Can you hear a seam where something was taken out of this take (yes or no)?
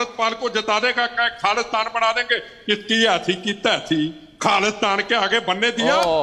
no